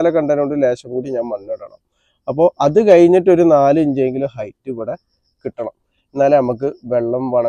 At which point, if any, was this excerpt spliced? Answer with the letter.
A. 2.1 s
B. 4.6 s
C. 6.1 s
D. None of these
D